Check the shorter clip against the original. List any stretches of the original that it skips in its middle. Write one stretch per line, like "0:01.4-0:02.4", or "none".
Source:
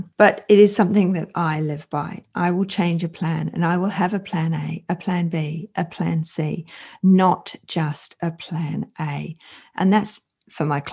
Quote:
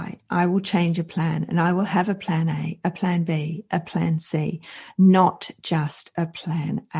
none